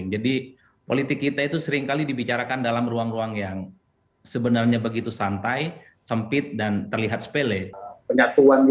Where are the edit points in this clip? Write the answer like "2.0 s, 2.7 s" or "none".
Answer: 7.7 s